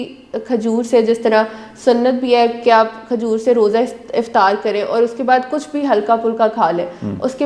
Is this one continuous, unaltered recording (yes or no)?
yes